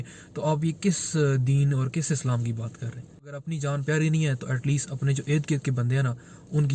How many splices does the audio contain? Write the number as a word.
one